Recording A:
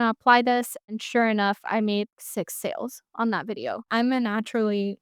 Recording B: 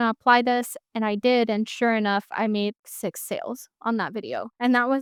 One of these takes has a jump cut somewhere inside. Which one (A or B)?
A